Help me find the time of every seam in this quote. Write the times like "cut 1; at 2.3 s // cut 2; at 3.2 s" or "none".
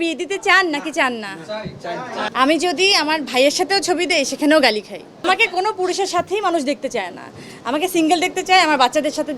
cut 1; at 2.2 s // cut 2; at 5.2 s